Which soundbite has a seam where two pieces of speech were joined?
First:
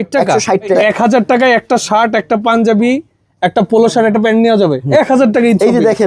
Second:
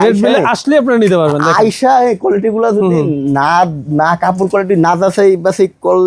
first; 2 cuts; at 0.8 s, 4.8 s

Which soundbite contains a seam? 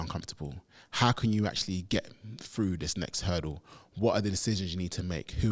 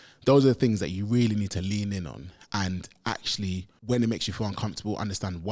second; 1 cut; at 3.7 s

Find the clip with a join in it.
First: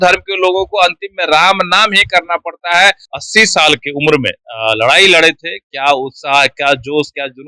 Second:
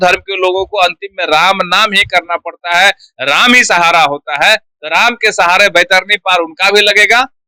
first; 1 cut; at 3.1 s

